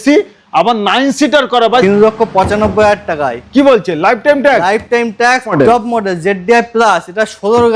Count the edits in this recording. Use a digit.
2